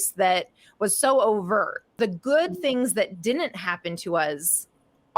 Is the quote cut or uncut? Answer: cut